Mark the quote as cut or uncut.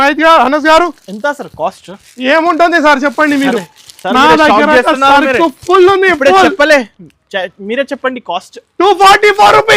uncut